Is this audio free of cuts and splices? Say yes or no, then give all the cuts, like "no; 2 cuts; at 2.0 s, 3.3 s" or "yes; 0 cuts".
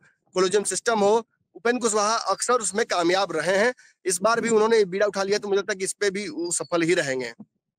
yes; 0 cuts